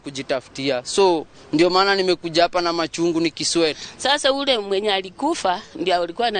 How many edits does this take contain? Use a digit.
1